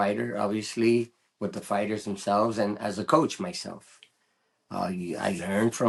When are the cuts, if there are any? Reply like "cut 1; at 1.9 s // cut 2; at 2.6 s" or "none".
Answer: none